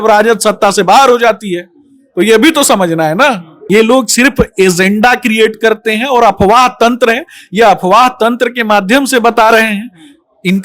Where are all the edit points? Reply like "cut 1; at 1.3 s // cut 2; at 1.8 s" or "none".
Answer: cut 1; at 3.6 s